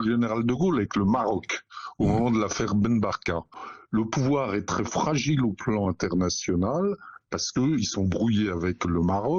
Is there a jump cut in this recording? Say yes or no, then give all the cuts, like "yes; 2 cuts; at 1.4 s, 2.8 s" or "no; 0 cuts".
yes; 1 cut; at 3.7 s